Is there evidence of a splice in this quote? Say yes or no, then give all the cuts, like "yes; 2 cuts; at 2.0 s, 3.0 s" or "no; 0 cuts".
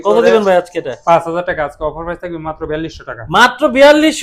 no; 0 cuts